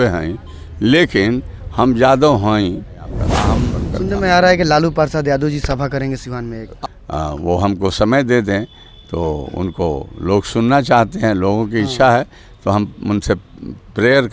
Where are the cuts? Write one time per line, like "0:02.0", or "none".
0:03.5
0:06.8